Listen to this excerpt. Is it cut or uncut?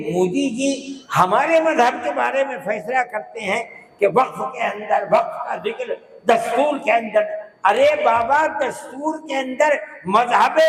uncut